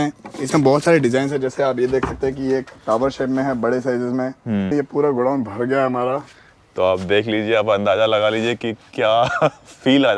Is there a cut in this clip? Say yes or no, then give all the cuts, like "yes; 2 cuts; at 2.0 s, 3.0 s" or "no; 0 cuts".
yes; 1 cut; at 4.7 s